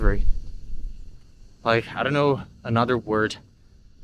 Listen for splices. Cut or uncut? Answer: uncut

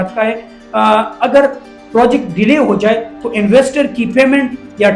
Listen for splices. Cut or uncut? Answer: uncut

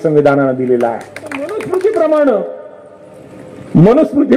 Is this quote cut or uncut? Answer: cut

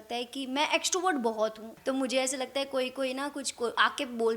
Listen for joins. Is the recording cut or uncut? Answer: cut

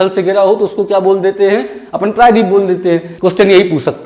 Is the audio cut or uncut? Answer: cut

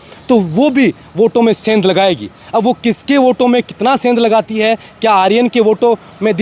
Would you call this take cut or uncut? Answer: uncut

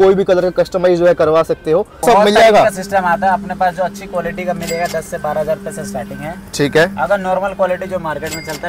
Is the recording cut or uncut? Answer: cut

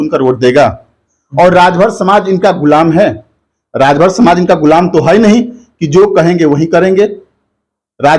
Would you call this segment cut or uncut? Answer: uncut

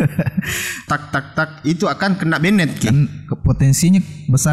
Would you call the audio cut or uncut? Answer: cut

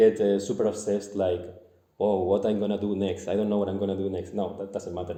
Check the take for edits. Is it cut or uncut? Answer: uncut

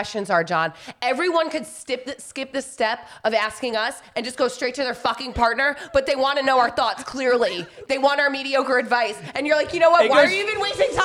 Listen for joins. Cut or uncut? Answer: uncut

